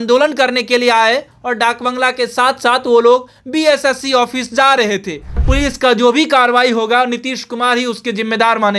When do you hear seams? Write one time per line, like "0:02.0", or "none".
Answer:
0:05.3